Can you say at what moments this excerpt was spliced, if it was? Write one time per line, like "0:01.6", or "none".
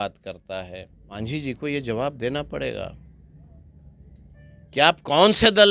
0:01.2